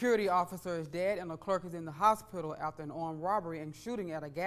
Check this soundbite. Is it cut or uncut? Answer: uncut